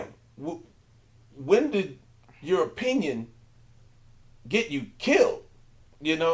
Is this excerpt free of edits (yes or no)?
yes